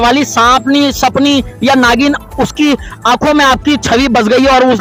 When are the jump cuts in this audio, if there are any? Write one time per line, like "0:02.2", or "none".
none